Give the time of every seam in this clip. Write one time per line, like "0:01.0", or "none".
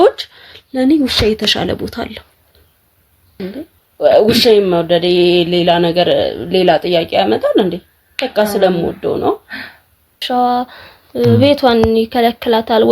0:03.4
0:10.2